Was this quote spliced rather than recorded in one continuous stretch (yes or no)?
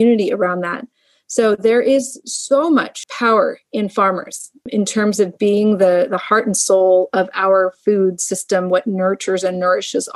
yes